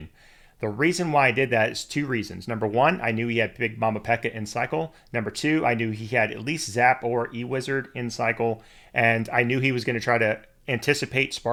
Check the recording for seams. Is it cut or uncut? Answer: uncut